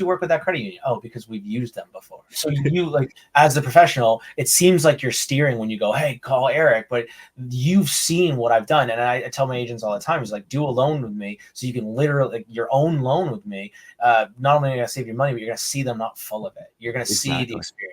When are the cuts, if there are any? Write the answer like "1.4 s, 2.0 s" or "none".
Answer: 2.3 s